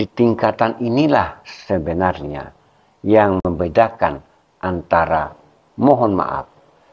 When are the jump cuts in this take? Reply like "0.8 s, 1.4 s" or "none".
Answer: 3.4 s